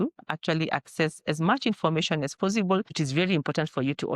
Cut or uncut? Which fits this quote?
cut